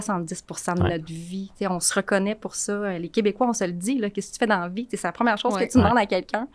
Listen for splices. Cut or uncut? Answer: uncut